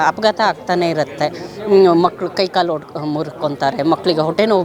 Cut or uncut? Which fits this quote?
uncut